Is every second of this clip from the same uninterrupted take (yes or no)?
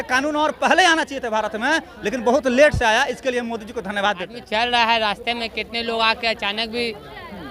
no